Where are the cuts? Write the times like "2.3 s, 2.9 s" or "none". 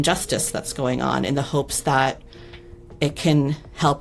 none

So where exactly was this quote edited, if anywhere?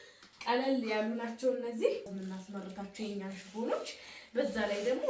2.1 s

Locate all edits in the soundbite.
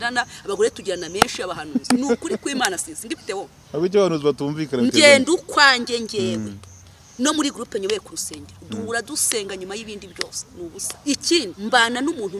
10.9 s, 11.6 s

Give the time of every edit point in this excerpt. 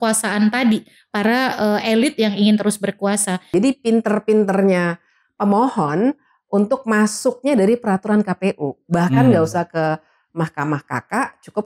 3.5 s

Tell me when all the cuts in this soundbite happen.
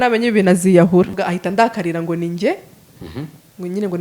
1.2 s

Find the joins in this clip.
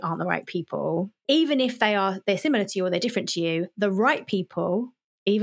1.2 s

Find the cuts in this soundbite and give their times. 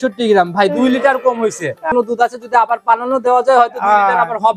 1.9 s

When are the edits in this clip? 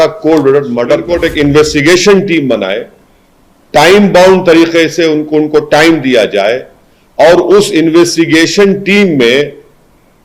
1.1 s

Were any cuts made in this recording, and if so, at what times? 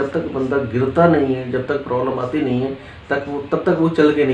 none

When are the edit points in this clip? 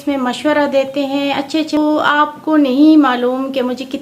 1.8 s

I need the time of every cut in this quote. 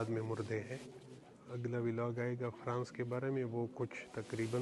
1.4 s

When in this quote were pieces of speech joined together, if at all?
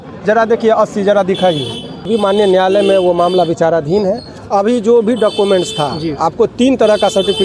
2.1 s

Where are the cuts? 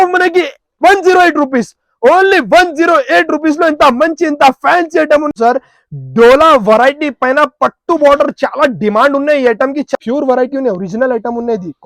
5.3 s, 9.9 s

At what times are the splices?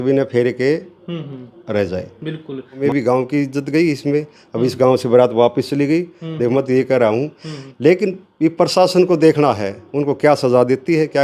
2.8 s

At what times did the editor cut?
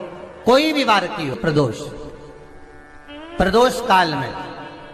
1.4 s

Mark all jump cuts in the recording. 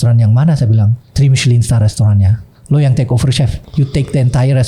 1.0 s, 3.6 s

